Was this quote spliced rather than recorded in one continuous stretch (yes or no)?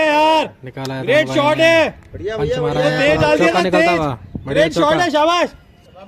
no